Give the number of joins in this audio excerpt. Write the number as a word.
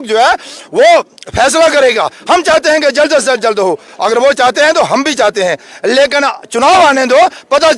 zero